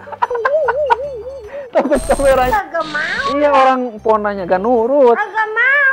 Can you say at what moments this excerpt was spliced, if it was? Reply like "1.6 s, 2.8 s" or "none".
2.5 s